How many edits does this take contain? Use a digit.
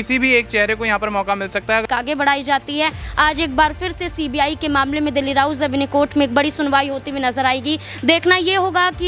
1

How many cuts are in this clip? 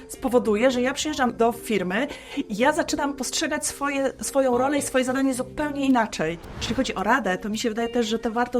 2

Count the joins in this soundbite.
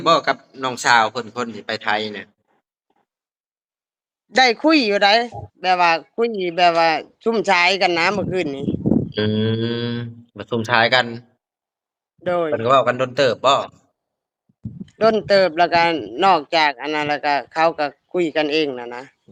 0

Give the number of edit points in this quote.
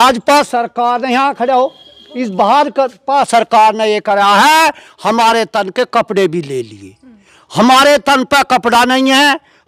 0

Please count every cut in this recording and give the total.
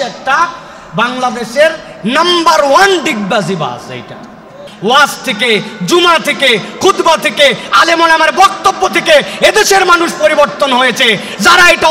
1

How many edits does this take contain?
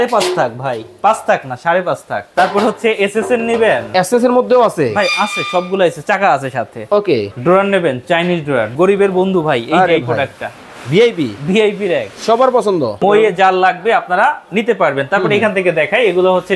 4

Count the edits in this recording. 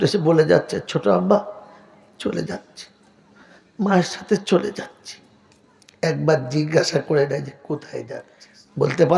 1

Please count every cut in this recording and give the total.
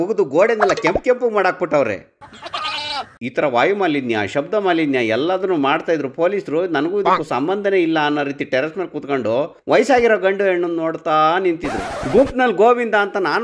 0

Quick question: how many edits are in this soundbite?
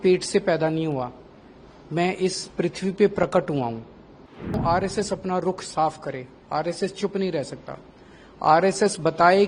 1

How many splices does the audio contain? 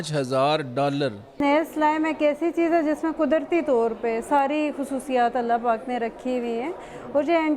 1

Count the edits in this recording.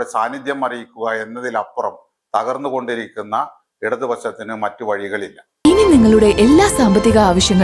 1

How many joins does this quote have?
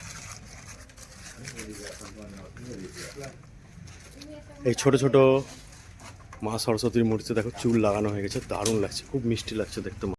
0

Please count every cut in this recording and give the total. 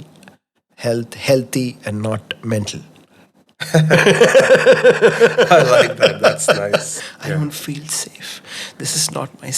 1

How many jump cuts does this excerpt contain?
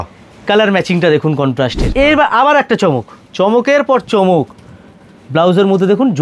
1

